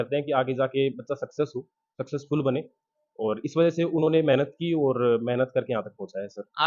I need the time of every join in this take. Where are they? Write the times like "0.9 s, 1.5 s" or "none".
none